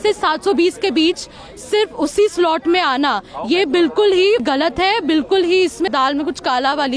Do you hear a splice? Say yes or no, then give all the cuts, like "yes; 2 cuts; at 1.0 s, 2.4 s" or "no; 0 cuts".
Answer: yes; 2 cuts; at 4.4 s, 5.9 s